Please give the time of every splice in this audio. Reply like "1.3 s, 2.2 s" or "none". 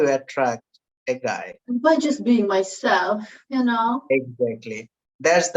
1.5 s